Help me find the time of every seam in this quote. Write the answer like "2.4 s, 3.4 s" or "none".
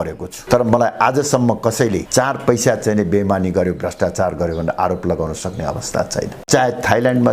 6.4 s